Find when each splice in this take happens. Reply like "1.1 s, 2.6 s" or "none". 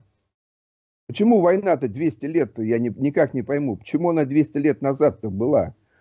none